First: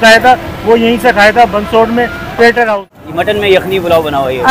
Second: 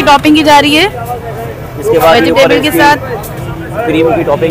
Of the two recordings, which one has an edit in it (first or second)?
first